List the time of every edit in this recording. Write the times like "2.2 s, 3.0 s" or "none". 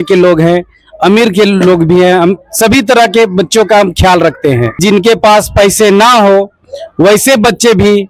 4.8 s